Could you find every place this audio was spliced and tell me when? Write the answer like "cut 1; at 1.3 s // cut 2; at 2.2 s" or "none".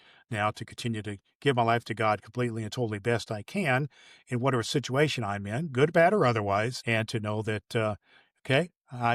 cut 1; at 6.8 s